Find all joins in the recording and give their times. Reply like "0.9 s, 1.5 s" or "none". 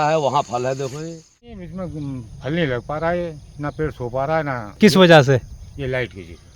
1.7 s, 4.6 s